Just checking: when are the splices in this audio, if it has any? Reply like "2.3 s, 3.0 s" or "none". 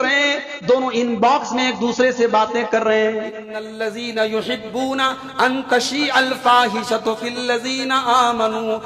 3.7 s